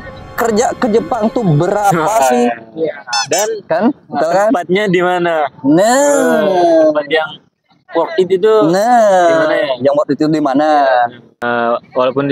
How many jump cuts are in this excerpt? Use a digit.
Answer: 1